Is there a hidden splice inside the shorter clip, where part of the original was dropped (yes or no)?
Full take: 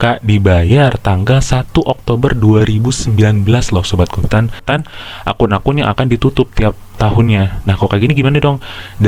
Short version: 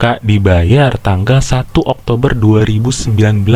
no